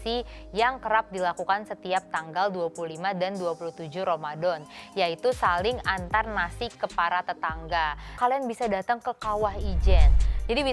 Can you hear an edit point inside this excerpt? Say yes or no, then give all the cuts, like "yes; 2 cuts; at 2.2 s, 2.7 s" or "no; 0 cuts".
yes; 1 cut; at 8.0 s